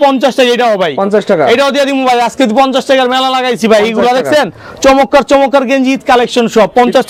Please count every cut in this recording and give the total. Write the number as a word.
zero